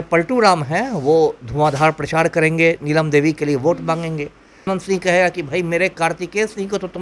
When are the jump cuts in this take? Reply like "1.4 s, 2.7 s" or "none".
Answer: 4.6 s